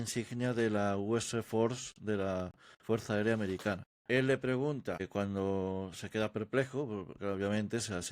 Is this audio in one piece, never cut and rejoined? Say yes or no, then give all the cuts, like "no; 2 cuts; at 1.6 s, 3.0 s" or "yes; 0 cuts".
no; 2 cuts; at 3.9 s, 5.1 s